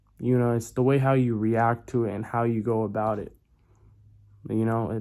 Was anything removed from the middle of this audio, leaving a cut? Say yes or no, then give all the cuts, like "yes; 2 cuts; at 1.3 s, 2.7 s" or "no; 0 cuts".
no; 0 cuts